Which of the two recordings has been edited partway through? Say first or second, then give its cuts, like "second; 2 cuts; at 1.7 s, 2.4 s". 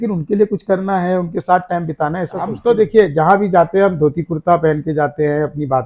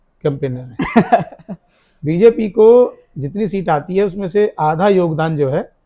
first; 1 cut; at 2.6 s